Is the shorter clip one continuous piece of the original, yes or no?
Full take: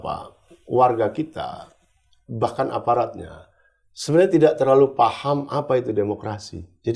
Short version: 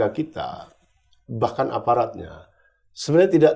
yes